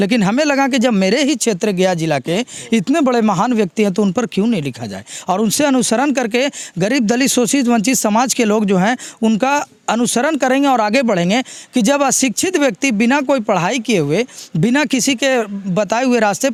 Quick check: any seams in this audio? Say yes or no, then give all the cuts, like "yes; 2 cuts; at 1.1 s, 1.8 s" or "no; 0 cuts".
no; 0 cuts